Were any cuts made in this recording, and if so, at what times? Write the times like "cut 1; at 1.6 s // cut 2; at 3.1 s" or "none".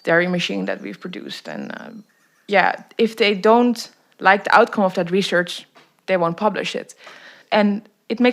cut 1; at 7.3 s